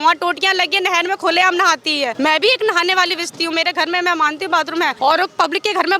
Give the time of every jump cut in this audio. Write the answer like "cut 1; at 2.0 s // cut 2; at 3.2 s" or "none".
cut 1; at 2.1 s // cut 2; at 4.9 s